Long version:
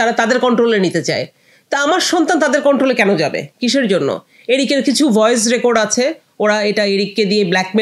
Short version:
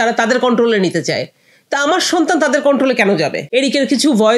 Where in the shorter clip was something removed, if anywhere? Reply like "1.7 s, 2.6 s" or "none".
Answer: 3.4 s